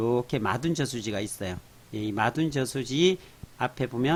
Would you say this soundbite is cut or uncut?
uncut